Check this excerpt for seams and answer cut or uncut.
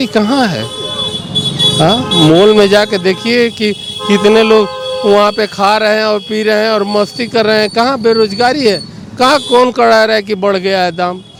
uncut